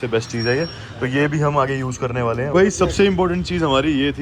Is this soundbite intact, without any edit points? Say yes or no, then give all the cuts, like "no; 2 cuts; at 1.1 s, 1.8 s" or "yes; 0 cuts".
no; 1 cut; at 2.5 s